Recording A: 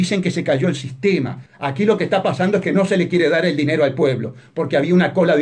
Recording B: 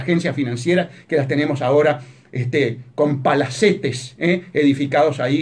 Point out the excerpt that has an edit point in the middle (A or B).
A